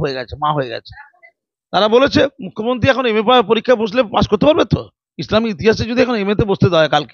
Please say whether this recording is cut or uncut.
uncut